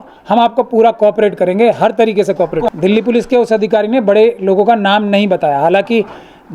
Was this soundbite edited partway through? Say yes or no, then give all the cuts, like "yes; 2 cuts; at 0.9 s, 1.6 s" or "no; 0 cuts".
yes; 1 cut; at 2.6 s